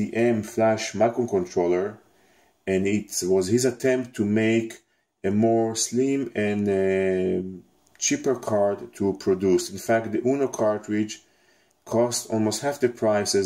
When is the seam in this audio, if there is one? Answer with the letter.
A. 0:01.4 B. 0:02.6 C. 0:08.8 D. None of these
A